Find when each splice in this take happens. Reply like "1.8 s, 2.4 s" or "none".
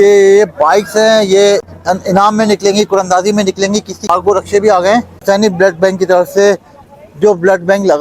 1.7 s, 4.0 s, 5.1 s